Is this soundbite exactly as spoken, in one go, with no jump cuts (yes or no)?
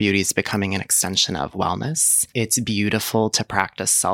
no